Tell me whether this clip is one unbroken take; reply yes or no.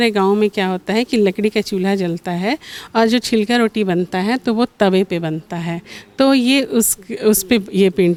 yes